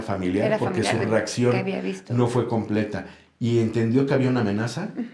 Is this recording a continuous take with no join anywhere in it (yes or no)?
yes